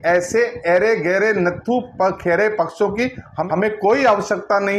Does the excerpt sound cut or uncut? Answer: cut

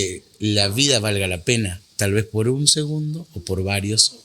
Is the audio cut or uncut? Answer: uncut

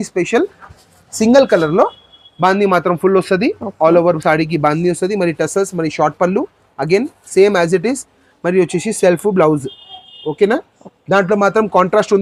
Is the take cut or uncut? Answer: uncut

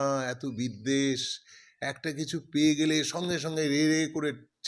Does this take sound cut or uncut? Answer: uncut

